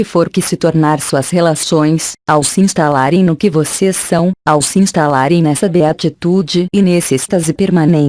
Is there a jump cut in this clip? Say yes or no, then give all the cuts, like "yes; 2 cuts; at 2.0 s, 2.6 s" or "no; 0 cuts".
yes; 1 cut; at 1.0 s